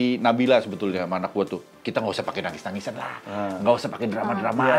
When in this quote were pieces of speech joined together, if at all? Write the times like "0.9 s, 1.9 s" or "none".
none